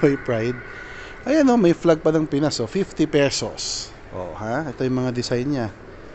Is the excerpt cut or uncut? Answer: uncut